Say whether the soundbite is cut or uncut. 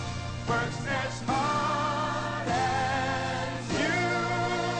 cut